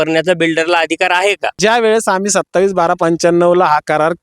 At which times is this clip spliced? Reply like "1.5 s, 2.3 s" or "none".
1.6 s